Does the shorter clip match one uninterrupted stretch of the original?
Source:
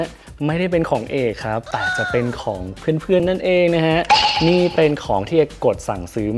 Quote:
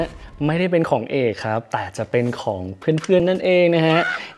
yes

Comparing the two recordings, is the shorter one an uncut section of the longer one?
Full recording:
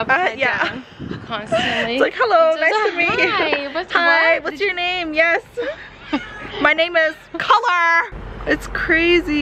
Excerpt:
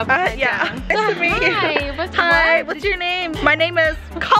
no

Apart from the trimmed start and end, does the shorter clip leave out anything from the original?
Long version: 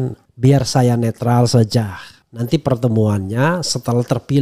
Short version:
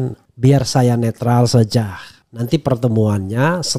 no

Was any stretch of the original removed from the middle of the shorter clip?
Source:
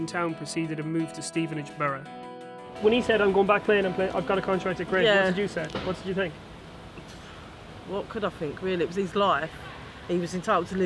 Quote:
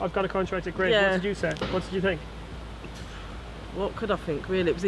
no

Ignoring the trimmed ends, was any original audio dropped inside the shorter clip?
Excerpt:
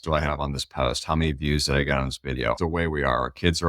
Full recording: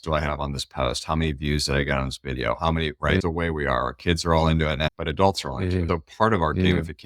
yes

